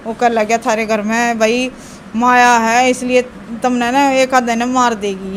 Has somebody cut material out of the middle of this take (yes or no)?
no